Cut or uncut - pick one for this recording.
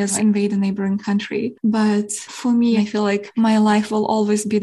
cut